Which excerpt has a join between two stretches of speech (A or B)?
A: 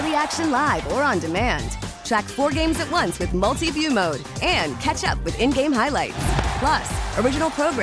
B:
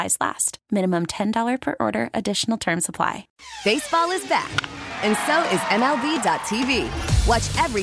B